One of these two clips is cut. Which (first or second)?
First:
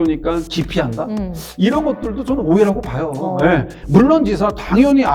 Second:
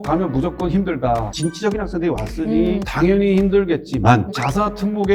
second